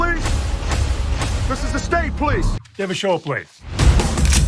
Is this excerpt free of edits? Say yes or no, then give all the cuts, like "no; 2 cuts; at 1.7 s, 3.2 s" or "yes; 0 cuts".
no; 1 cut; at 2.5 s